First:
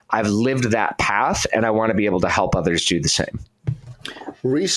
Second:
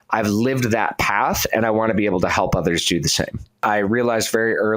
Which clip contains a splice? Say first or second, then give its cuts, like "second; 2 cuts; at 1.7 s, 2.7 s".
second; 1 cut; at 3.6 s